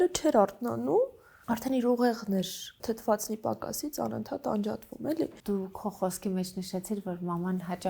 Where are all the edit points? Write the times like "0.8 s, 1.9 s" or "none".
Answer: 1.3 s, 2.7 s, 5.4 s